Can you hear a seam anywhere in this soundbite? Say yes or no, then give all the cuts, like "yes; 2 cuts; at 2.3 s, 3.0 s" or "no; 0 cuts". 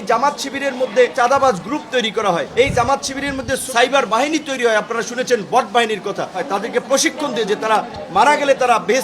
yes; 4 cuts; at 1.1 s, 2.5 s, 3.6 s, 6.4 s